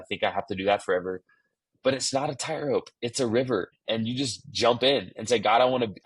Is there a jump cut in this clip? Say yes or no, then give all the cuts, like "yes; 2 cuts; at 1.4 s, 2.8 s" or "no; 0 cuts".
yes; 1 cut; at 3.8 s